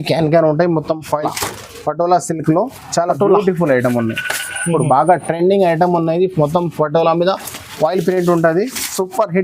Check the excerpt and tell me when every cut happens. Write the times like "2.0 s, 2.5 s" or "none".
1.1 s